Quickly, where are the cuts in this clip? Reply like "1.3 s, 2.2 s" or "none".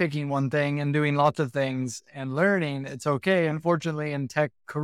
none